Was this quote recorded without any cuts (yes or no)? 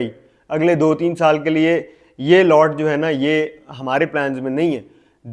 yes